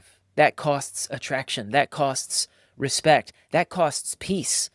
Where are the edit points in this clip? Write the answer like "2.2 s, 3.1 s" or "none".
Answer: none